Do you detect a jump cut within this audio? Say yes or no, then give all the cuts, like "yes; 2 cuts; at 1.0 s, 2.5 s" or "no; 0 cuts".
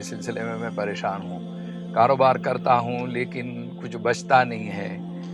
no; 0 cuts